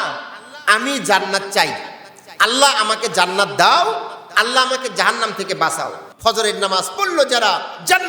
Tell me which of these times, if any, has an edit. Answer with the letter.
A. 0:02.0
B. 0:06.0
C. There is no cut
B